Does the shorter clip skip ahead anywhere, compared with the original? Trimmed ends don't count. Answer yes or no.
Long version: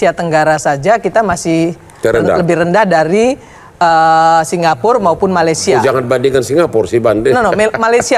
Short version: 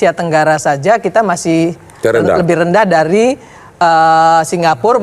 no